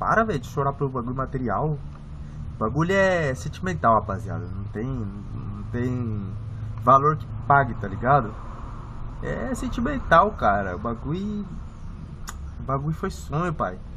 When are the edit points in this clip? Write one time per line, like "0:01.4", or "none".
none